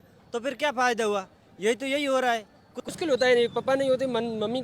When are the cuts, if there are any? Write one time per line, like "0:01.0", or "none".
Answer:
0:02.9

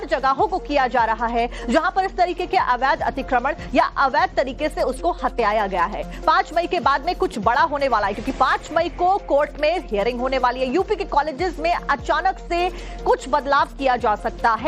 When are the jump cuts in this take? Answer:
0:06.8

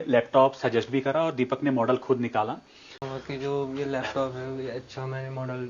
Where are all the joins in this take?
0:03.0

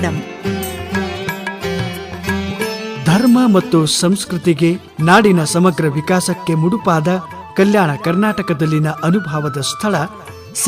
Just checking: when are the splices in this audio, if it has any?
0:04.9

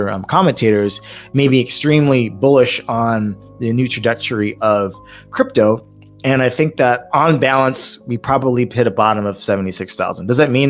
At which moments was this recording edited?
none

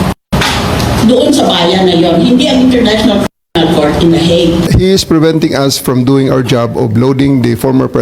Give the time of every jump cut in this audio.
0:04.7

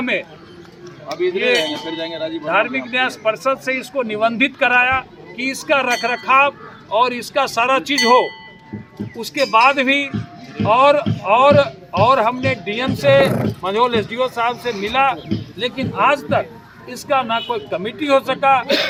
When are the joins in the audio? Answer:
none

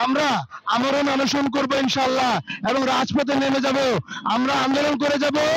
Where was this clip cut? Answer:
none

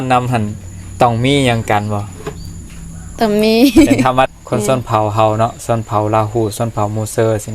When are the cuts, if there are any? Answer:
0:04.3

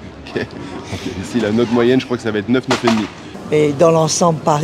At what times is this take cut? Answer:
0:03.4

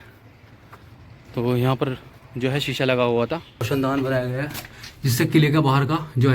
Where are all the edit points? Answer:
0:03.7

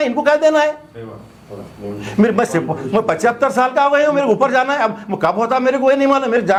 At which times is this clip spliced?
none

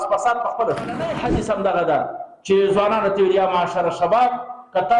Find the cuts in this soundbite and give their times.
0:01.1

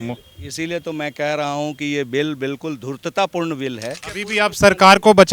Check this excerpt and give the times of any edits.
0:04.2

